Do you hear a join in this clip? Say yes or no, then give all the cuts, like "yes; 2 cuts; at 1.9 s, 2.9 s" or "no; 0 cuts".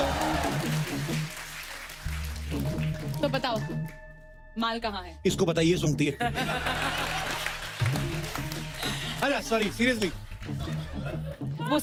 no; 0 cuts